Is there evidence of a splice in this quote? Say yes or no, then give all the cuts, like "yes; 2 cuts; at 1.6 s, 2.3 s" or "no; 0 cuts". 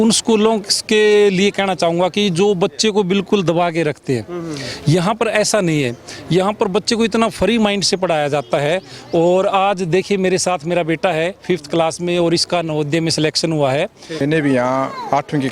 yes; 1 cut; at 14.2 s